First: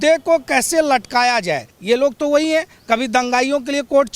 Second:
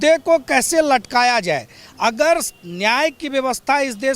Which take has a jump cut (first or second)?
first